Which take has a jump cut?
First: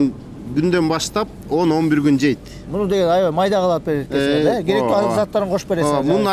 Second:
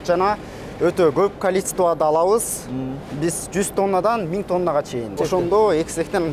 second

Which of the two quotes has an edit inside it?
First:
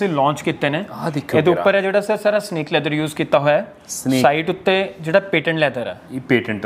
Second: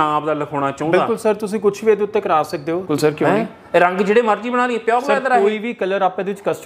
second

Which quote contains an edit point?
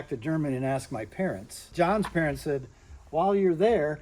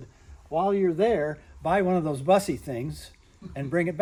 first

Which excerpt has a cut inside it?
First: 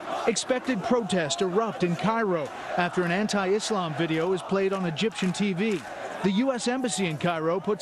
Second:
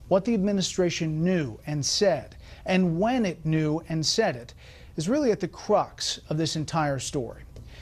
first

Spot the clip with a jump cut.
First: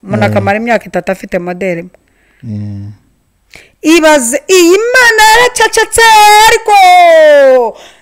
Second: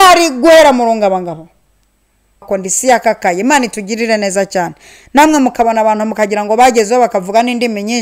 second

